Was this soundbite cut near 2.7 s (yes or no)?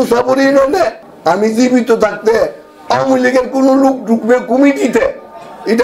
no